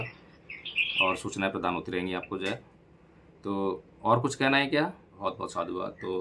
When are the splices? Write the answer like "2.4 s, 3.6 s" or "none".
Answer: 5.1 s